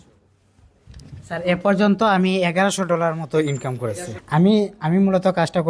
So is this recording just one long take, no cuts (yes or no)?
no